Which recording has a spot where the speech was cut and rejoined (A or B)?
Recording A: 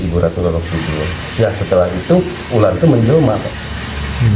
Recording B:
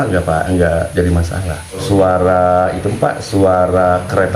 B